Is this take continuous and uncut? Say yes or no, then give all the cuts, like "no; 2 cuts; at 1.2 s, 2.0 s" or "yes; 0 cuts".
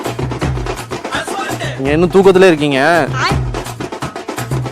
no; 2 cuts; at 1.7 s, 3.3 s